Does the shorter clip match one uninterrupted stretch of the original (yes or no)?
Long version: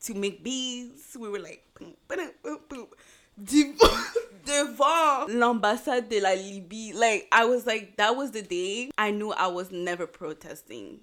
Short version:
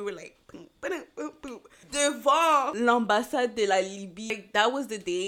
no